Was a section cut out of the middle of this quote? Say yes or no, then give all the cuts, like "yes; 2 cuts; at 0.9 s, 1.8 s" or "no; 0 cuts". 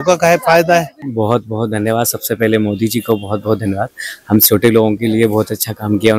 yes; 1 cut; at 1.0 s